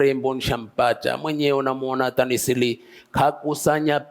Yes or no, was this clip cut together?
no